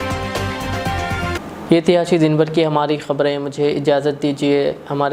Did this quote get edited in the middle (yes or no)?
no